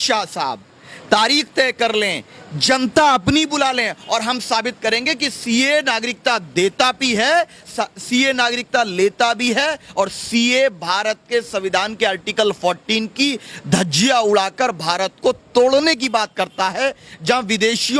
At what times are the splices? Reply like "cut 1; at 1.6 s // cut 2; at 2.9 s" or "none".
none